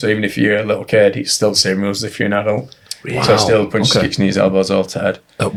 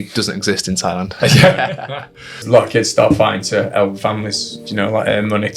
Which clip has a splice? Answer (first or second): second